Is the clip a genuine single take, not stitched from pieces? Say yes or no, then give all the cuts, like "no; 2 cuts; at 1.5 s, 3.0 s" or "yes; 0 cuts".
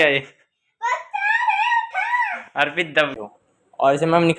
no; 1 cut; at 3.2 s